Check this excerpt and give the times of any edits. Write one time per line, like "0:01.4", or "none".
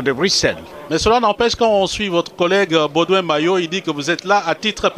0:01.4